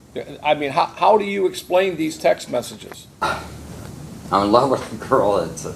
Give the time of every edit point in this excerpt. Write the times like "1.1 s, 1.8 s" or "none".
3.2 s, 4.2 s